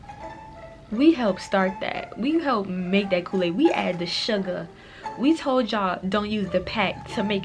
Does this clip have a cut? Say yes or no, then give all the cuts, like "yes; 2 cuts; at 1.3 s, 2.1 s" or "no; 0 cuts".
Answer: no; 0 cuts